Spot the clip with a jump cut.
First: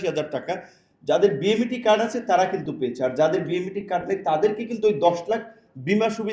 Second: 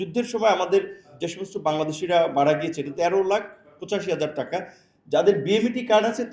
second; 2 cuts; at 1.1 s, 2.9 s

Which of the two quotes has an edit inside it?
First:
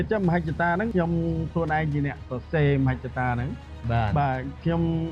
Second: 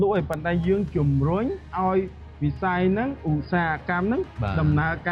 first; 1 cut; at 0.9 s

